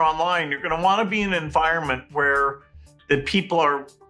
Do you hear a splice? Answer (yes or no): no